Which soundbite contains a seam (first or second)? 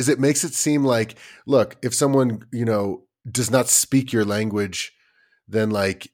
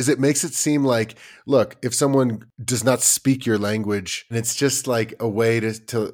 second